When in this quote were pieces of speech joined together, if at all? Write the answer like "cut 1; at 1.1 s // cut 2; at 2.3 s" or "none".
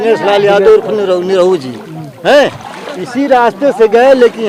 none